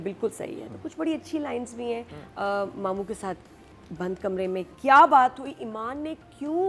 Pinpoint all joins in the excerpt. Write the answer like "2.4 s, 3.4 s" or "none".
2.2 s

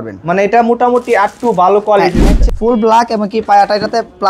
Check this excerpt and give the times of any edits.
2.3 s

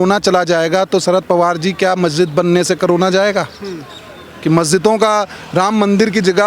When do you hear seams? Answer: none

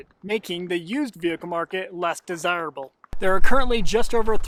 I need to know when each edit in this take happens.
none

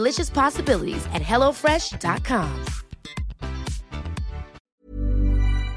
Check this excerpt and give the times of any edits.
4.6 s

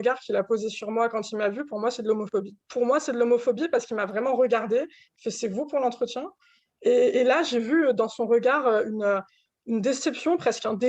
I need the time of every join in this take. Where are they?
2.6 s

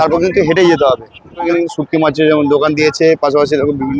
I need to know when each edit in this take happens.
1.5 s

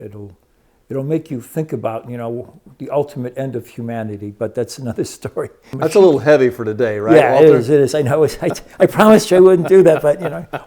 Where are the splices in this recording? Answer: 5.7 s

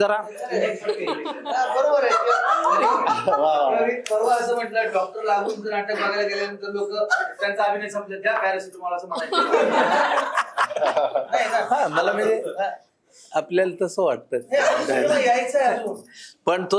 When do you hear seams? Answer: none

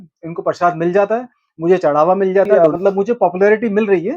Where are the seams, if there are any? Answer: 2.5 s

